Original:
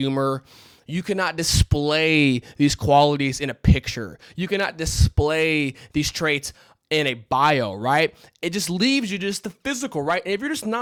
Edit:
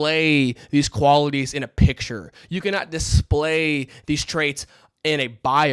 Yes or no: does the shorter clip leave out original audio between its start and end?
no